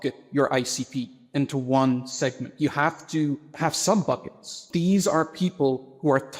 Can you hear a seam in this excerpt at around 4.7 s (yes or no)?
yes